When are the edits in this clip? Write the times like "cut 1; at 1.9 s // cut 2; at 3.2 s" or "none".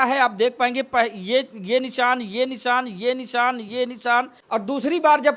cut 1; at 4.4 s